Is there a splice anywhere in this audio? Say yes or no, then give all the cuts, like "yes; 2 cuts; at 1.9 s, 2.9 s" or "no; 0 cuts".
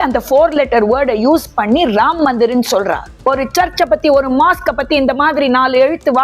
yes; 1 cut; at 3.2 s